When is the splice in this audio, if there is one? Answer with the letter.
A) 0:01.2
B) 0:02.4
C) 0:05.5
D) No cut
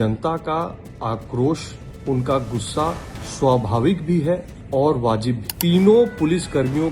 C